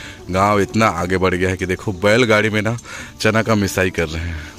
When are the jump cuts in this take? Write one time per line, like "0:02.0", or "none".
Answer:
none

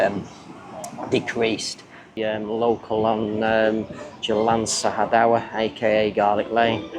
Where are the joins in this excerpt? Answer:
0:02.2

